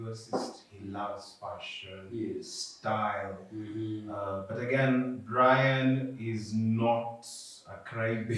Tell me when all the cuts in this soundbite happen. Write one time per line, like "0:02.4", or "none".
none